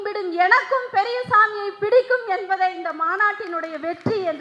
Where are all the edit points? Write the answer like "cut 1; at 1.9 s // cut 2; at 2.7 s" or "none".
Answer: none